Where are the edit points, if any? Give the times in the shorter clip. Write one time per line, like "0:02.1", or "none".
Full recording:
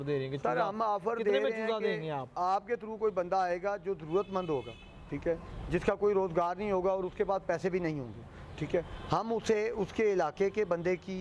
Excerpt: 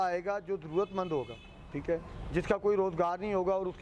none